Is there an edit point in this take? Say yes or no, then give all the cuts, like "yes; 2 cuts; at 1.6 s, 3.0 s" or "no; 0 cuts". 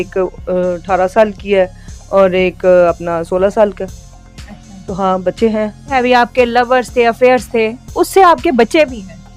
yes; 1 cut; at 5.9 s